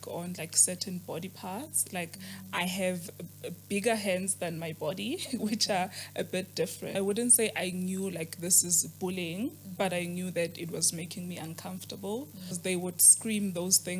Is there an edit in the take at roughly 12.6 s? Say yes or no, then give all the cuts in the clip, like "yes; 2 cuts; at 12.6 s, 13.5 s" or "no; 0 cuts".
yes; 2 cuts; at 6.9 s, 12.6 s